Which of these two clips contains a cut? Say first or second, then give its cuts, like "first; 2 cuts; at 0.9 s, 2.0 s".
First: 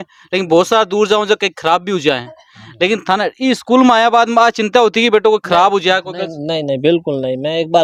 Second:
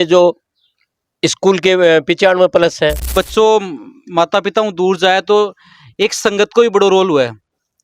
second; 1 cut; at 3.0 s